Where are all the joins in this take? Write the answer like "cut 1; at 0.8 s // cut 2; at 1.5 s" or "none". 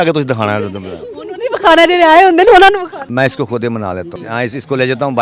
cut 1; at 3.0 s // cut 2; at 4.1 s